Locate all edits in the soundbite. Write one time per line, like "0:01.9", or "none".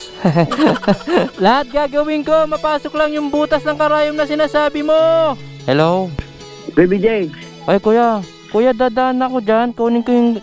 0:01.3
0:05.4